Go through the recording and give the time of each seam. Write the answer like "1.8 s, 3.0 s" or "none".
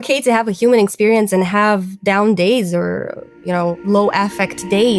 3.8 s